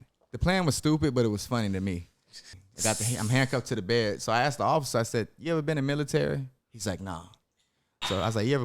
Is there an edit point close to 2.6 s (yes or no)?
yes